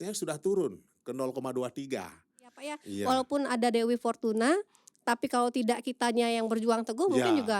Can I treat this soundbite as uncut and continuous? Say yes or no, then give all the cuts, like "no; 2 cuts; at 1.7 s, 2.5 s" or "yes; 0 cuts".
no; 1 cut; at 2.9 s